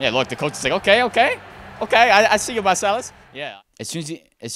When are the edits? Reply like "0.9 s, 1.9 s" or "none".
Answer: 3.2 s